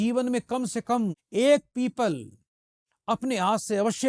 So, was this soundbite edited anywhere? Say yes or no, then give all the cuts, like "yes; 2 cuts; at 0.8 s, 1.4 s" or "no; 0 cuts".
yes; 1 cut; at 1.2 s